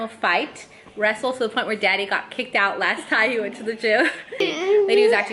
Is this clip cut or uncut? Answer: cut